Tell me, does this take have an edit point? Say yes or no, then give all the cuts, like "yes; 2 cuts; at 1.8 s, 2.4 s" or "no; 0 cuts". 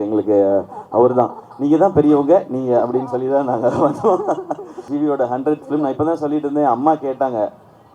yes; 1 cut; at 4.8 s